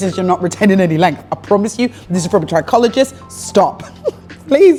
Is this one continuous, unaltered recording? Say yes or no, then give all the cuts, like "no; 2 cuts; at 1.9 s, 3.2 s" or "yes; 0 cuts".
yes; 0 cuts